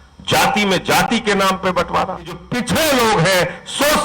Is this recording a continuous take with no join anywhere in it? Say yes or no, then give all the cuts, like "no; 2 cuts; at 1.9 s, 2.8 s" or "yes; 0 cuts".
no; 1 cut; at 2.5 s